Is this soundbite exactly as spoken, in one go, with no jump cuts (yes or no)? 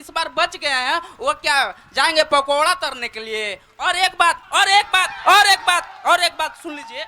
yes